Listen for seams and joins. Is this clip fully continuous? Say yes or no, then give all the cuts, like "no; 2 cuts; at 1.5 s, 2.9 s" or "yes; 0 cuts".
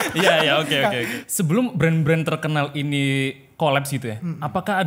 no; 1 cut; at 1.1 s